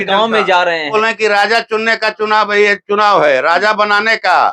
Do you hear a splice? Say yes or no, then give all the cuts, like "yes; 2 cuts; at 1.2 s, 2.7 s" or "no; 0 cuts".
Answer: yes; 1 cut; at 0.9 s